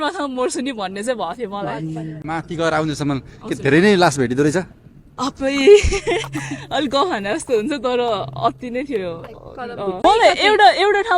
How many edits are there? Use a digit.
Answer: 2